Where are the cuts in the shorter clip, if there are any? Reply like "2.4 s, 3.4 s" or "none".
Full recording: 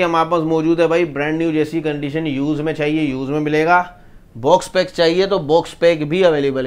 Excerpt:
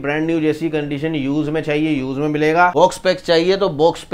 2.7 s